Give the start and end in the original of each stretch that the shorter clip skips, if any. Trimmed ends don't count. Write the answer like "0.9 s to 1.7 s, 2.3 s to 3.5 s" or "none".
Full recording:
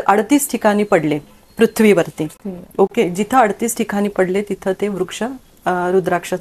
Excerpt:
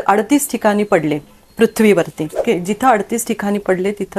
2.4 s to 2.9 s